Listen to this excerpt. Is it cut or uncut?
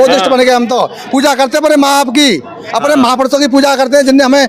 uncut